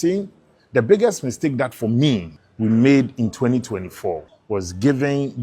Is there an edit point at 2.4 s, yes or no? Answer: yes